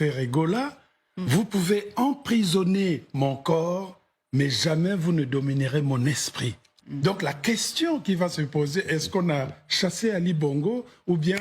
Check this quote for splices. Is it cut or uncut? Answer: cut